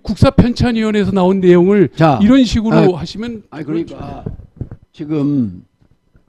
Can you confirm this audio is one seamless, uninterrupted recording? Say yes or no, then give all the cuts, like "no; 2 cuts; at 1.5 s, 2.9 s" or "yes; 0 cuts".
yes; 0 cuts